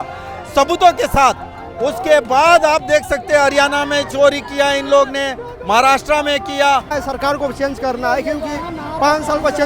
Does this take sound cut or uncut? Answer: cut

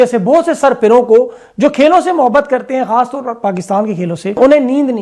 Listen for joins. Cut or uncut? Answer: uncut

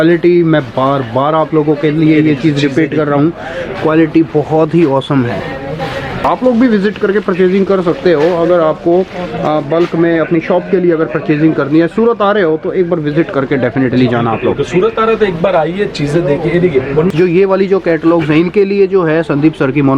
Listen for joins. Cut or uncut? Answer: cut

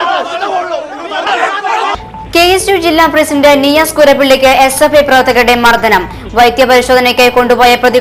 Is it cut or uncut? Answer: uncut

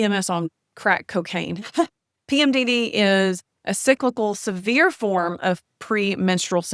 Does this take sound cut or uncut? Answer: uncut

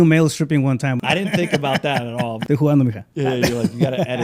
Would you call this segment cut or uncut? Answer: cut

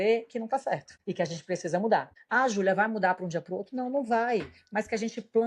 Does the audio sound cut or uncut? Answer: cut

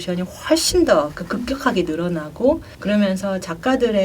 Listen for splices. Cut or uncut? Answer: cut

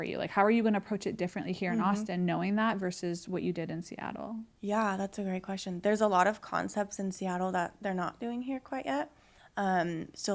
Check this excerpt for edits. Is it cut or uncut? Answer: uncut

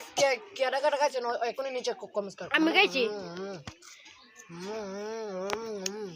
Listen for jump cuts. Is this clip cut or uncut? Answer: uncut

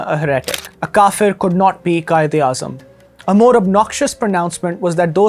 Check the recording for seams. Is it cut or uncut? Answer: uncut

